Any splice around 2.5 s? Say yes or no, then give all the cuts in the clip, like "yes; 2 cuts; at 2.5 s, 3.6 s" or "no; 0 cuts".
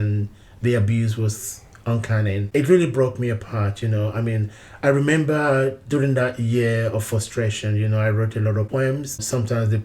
yes; 2 cuts; at 2.5 s, 8.8 s